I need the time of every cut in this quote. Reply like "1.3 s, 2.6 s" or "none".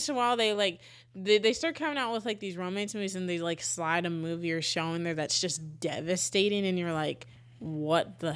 none